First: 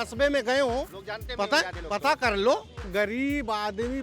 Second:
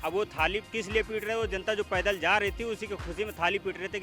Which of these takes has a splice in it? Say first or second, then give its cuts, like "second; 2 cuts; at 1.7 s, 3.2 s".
first; 1 cut; at 2.8 s